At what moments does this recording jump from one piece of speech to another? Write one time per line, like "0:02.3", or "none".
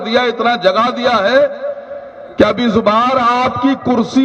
none